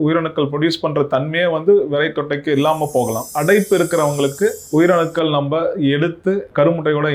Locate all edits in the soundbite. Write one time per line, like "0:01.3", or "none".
0:03.3